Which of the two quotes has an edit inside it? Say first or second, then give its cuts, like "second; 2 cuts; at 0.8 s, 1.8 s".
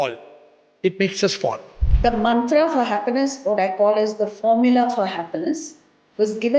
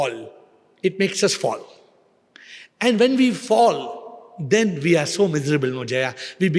first; 1 cut; at 1.8 s